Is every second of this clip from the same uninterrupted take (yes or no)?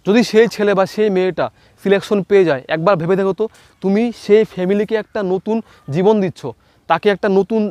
yes